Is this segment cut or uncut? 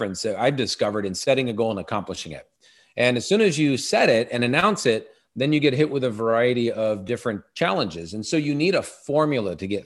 uncut